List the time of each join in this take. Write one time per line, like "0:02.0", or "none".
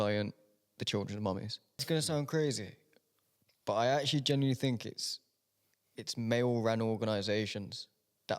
0:01.8